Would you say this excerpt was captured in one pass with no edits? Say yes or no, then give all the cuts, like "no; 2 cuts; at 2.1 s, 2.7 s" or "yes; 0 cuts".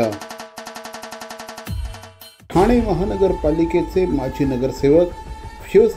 no; 1 cut; at 2.4 s